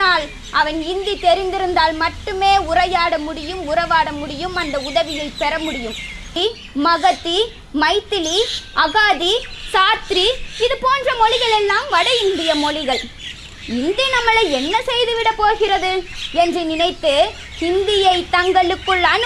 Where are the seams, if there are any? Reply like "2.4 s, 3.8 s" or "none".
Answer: 6.4 s